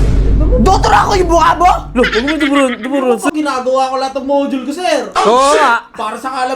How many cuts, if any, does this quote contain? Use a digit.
1